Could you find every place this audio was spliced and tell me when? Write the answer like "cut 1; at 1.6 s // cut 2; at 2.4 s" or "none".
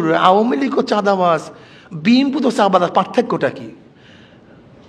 none

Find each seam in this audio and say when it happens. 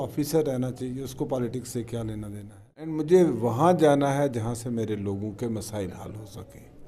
cut 1; at 2.9 s

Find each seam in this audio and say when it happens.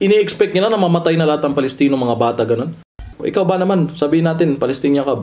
cut 1; at 3.0 s

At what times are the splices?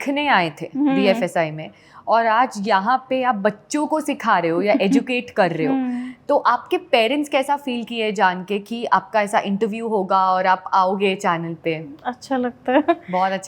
none

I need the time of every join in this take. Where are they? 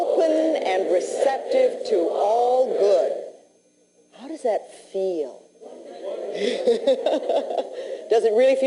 cut 1; at 3.1 s

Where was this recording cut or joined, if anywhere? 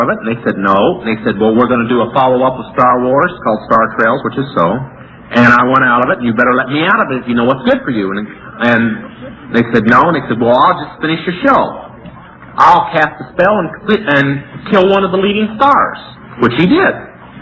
cut 1; at 2.6 s

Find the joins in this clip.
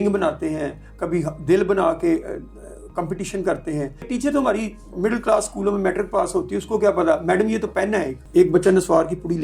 cut 1; at 4.1 s // cut 2; at 8.2 s

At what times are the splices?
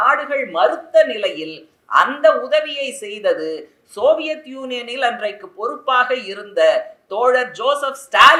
none

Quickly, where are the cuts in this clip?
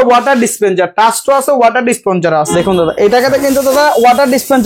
cut 1; at 2.5 s

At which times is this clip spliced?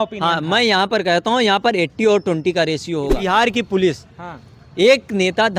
cut 1; at 3.2 s

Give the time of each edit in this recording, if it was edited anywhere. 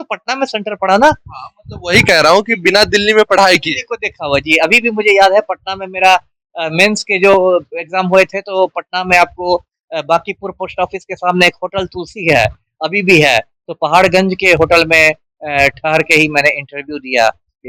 cut 1; at 13.6 s

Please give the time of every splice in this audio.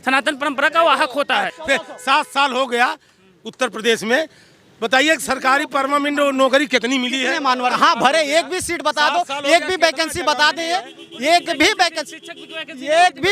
cut 1; at 1.5 s // cut 2; at 7.8 s

